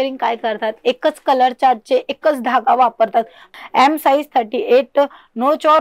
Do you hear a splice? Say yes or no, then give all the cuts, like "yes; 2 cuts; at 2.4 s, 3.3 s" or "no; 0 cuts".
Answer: yes; 1 cut; at 3.5 s